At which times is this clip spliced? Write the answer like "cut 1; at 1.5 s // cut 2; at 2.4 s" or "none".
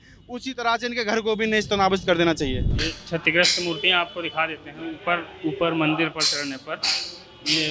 cut 1; at 2.7 s